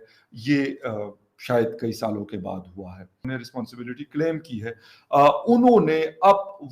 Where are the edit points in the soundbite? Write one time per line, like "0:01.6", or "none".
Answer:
0:03.3